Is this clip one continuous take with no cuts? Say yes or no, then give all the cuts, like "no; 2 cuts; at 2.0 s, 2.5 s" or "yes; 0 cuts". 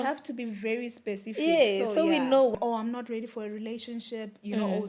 no; 1 cut; at 2.5 s